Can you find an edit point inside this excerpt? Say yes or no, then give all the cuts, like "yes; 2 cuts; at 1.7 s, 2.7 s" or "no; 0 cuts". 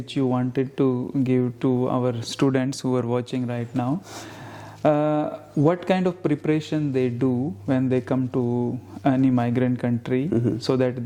no; 0 cuts